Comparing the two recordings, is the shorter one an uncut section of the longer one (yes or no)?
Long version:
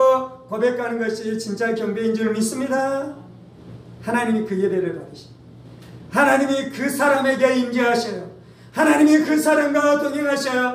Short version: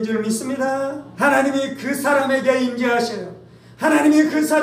no